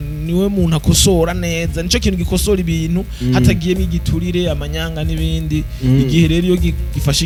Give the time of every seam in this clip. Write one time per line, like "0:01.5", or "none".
none